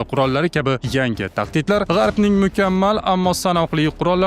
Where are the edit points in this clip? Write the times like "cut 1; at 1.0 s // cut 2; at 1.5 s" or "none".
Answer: none